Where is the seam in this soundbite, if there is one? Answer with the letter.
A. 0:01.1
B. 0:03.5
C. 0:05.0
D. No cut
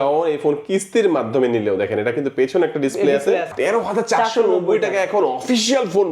B